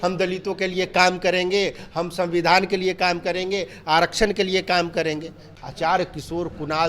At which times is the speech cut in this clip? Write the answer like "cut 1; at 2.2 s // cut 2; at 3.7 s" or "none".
cut 1; at 5.4 s